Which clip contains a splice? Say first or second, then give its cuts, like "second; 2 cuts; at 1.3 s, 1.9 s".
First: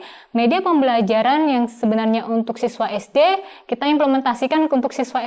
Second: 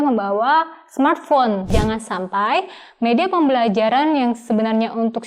second; 1 cut; at 1.7 s